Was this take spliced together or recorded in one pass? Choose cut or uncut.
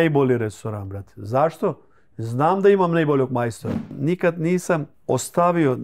cut